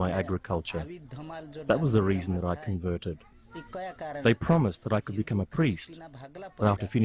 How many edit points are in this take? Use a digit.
1